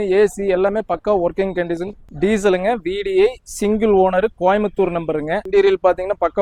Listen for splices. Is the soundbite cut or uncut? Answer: cut